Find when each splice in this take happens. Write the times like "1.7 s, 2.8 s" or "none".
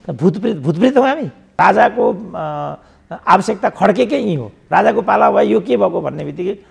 1.4 s